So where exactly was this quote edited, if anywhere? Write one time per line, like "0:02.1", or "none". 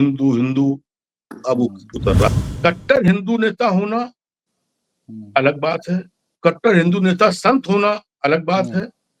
0:02.3